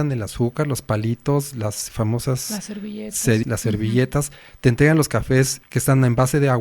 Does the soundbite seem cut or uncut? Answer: cut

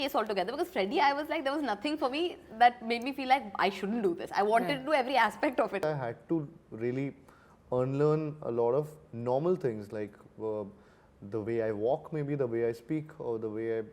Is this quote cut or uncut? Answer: cut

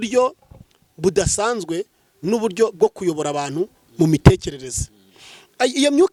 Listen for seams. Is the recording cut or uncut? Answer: uncut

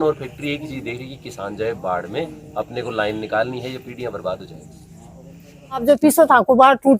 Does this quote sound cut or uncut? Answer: cut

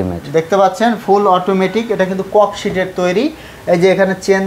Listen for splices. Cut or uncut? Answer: uncut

